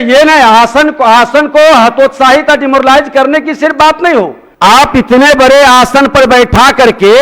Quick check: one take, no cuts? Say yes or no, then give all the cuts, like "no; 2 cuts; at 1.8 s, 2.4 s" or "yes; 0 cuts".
no; 1 cut; at 4.4 s